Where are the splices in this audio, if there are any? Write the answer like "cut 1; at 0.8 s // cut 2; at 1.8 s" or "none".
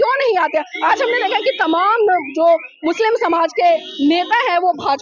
none

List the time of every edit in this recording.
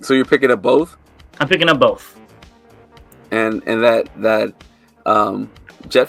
none

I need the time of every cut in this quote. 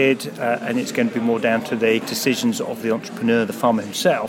cut 1; at 2.1 s

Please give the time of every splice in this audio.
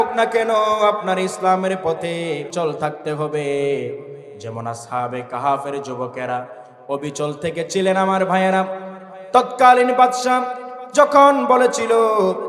cut 1; at 2.5 s

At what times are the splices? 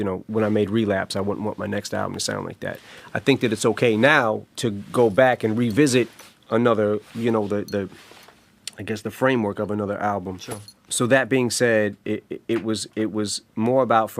cut 1; at 9.7 s

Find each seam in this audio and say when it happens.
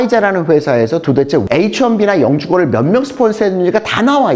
cut 1; at 1.5 s

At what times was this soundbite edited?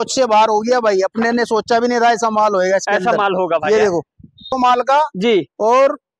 cut 1; at 4.5 s

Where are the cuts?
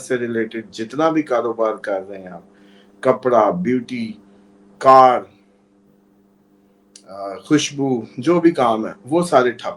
none

